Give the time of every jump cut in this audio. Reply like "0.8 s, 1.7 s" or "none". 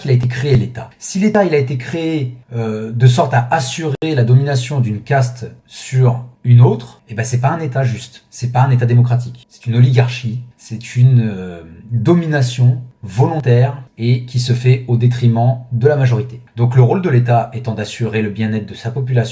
none